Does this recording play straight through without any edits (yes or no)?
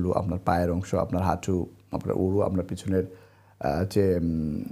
yes